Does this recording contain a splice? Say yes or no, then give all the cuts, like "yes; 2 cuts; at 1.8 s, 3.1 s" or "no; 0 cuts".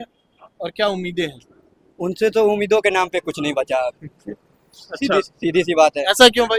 no; 0 cuts